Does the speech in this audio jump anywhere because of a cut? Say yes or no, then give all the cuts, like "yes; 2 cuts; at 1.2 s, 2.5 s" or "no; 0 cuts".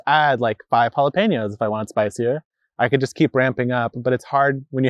no; 0 cuts